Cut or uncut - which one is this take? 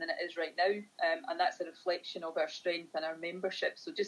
uncut